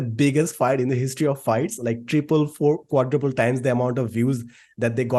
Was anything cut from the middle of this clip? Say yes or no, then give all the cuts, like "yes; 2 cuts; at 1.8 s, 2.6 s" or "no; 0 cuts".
no; 0 cuts